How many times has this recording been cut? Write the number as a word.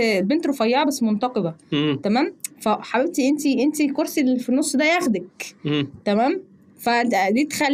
zero